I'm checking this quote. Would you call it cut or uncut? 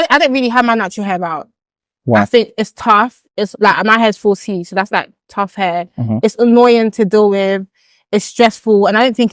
uncut